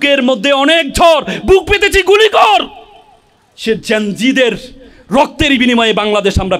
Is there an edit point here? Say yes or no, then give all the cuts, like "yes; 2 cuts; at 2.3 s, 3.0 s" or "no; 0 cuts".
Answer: no; 0 cuts